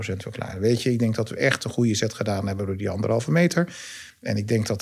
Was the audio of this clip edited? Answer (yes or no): no